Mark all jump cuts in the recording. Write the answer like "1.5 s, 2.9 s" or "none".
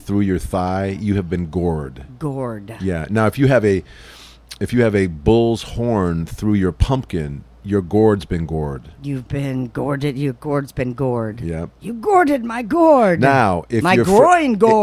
none